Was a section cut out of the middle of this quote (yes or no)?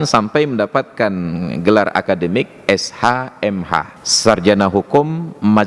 yes